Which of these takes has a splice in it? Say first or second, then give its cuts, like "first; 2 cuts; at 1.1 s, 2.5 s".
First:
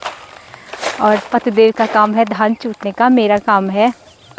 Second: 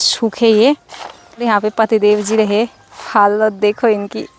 second; 1 cut; at 1.4 s